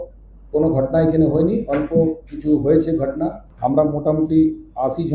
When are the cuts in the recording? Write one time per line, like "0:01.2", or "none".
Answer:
0:03.4